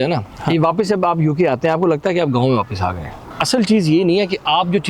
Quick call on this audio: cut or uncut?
cut